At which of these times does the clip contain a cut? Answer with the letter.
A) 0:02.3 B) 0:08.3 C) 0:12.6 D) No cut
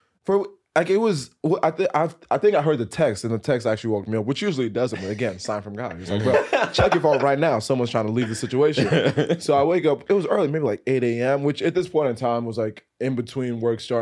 D